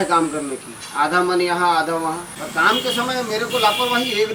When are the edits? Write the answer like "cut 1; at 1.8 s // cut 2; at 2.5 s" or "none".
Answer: cut 1; at 2.4 s